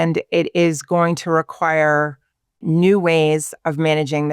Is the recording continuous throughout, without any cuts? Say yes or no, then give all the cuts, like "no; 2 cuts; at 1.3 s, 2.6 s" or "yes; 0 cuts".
no; 1 cut; at 2.6 s